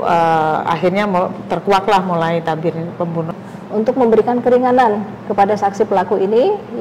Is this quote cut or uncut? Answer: cut